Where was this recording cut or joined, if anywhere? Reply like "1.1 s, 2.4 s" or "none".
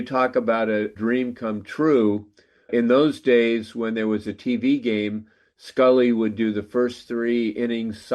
0.9 s, 2.7 s